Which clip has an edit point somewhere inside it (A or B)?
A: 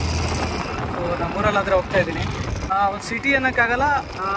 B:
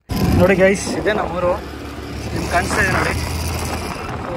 A